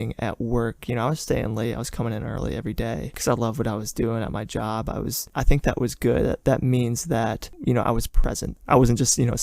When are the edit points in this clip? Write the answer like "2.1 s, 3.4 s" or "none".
5.3 s, 7.5 s, 8.5 s